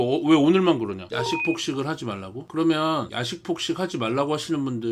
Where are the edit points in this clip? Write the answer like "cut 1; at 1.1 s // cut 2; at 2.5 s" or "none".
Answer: cut 1; at 1.0 s // cut 2; at 2.4 s